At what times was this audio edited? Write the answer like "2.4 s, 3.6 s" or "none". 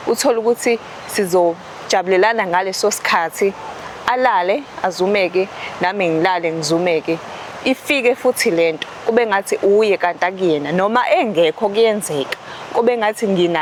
none